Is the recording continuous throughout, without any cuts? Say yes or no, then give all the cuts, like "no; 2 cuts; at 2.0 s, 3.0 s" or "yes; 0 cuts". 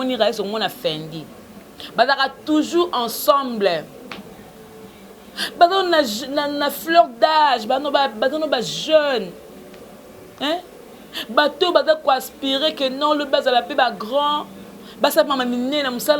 yes; 0 cuts